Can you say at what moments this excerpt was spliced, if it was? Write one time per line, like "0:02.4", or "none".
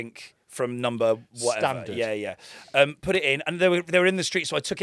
none